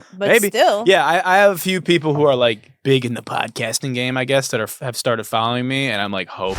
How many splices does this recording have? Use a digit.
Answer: 0